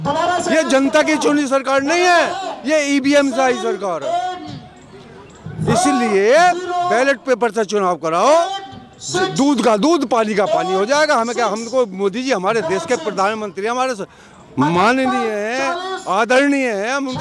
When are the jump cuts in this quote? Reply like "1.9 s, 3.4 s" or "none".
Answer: none